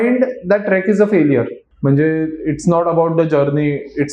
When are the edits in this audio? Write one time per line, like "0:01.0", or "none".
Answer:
0:01.6